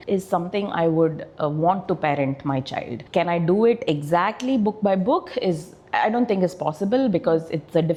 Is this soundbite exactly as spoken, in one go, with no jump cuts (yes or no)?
yes